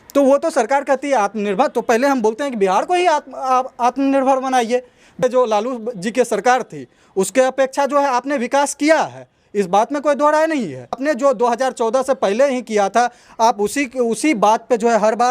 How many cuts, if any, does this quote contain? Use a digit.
2